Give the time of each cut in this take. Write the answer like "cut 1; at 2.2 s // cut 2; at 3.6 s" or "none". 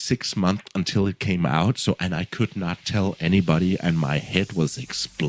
none